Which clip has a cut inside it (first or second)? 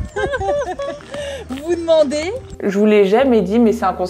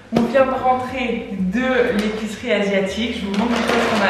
first